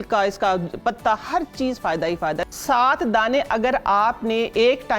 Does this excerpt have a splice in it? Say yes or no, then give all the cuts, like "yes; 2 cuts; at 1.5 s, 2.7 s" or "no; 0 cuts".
yes; 1 cut; at 2.4 s